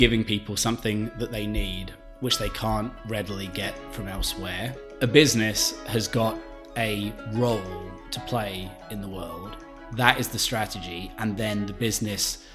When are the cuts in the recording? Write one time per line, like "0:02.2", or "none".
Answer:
0:04.8